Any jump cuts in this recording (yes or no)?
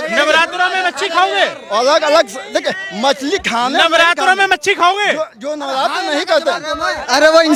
no